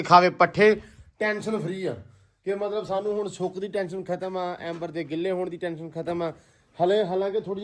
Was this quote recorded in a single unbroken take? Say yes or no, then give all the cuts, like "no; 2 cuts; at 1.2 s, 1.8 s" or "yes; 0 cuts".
yes; 0 cuts